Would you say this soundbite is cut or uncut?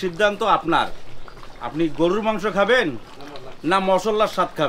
uncut